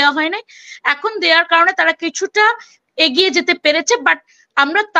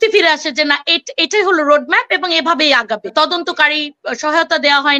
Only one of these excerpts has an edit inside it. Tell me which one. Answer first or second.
second